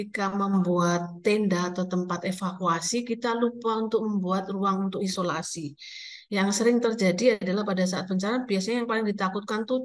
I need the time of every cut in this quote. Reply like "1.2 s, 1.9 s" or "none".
none

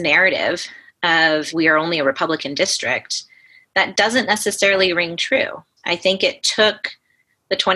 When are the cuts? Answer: 1.5 s, 5.7 s

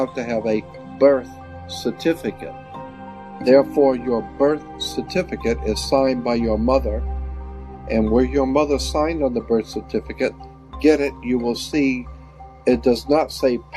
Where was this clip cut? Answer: 3.0 s

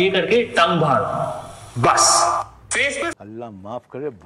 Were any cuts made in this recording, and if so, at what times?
3.2 s

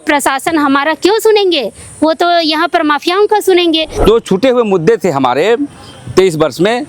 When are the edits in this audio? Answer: 3.9 s

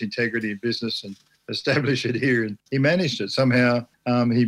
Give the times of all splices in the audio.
2.6 s

